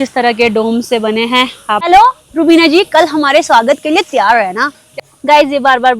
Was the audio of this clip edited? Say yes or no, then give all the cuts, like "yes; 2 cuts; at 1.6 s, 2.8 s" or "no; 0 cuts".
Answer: yes; 2 cuts; at 1.9 s, 4.8 s